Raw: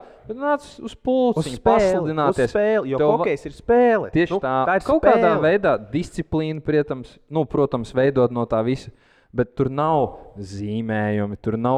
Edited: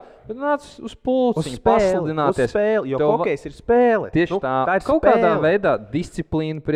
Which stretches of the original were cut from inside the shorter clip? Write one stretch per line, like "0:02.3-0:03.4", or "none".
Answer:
none